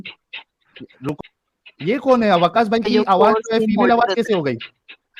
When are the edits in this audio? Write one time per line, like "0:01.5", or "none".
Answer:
0:01.2